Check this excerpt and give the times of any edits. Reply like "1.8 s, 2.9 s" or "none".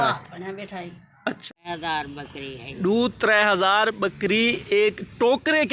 1.5 s